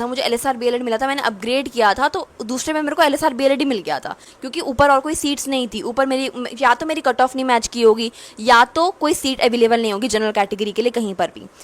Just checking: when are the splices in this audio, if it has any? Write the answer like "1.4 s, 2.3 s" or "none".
none